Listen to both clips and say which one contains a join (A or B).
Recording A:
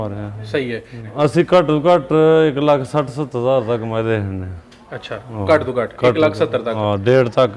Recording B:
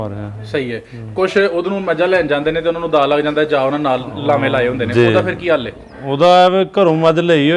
A